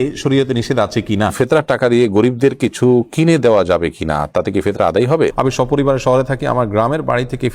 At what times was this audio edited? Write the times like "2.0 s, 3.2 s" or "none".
1.3 s, 5.3 s